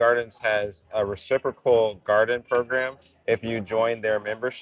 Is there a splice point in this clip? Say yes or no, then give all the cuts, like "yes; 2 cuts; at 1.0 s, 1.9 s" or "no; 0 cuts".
no; 0 cuts